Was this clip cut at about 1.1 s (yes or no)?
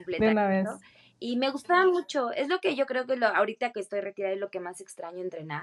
no